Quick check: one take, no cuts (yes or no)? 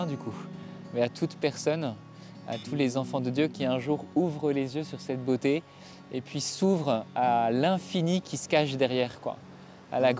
yes